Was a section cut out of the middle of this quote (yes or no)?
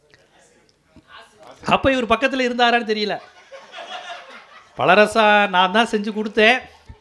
no